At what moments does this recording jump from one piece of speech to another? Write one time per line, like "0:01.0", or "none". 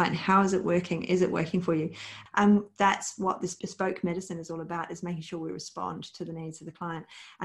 0:02.1
0:03.6